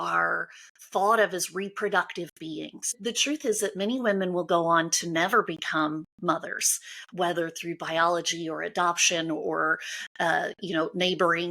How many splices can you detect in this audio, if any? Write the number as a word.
one